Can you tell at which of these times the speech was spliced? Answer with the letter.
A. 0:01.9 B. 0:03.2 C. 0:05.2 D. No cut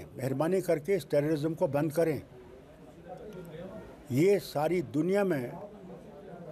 D